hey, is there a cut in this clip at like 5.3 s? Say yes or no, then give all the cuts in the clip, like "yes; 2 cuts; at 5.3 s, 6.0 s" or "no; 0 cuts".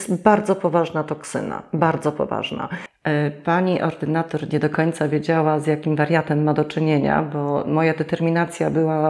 no; 1 cut; at 2.8 s